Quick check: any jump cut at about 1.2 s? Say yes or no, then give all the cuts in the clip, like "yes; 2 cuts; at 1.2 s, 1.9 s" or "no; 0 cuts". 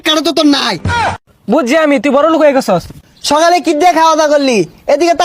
yes; 2 cuts; at 1.2 s, 2.9 s